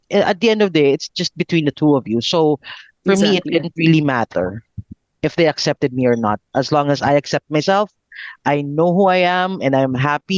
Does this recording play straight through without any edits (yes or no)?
yes